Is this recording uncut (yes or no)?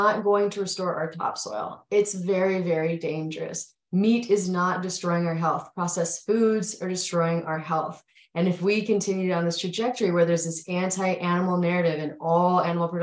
yes